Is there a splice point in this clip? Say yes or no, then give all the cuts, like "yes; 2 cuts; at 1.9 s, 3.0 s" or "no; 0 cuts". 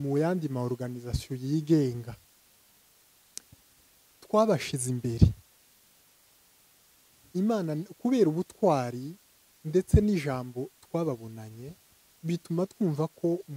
no; 0 cuts